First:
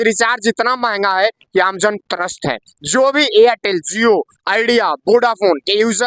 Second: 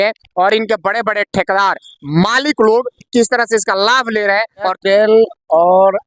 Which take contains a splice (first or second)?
second